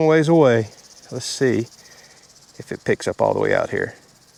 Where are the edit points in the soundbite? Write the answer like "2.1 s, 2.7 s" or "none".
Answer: none